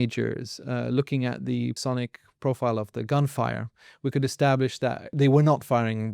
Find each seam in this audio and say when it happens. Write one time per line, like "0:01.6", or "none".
0:01.8
0:05.1